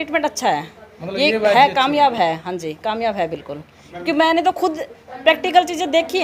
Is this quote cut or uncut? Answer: uncut